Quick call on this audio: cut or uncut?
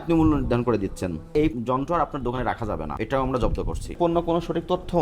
cut